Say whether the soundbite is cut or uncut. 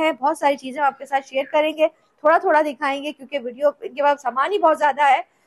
uncut